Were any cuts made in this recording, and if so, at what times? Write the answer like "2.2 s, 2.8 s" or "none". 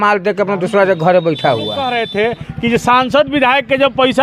1.9 s